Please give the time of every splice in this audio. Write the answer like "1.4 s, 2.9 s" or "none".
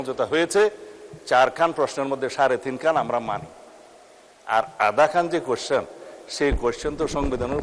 none